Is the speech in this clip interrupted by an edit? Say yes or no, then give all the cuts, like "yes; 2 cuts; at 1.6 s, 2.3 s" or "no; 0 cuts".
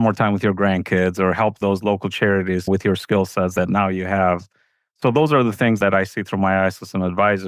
yes; 1 cut; at 3.5 s